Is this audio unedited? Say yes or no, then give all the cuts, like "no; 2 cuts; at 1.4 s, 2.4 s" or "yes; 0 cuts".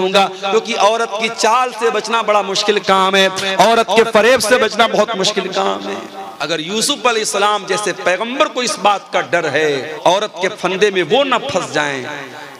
no; 2 cuts; at 6.3 s, 9.9 s